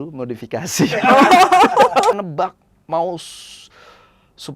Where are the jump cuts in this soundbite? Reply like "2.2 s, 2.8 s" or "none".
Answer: 2.1 s